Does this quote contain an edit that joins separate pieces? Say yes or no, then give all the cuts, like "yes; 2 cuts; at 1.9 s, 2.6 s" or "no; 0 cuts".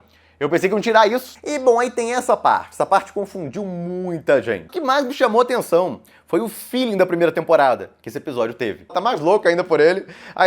yes; 3 cuts; at 1.3 s, 4.7 s, 8.9 s